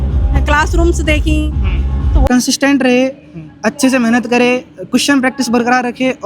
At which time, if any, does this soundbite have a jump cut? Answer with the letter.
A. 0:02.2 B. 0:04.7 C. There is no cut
A